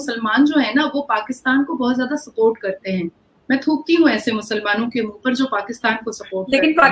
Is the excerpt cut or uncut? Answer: uncut